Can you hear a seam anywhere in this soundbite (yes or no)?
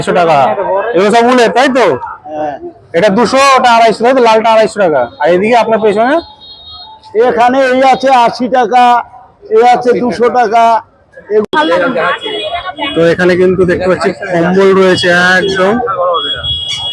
yes